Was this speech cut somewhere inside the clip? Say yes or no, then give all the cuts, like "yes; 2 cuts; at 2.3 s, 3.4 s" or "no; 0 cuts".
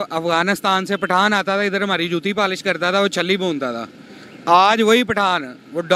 no; 0 cuts